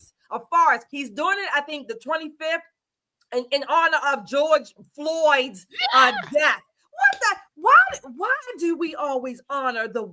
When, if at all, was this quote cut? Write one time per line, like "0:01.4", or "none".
0:00.9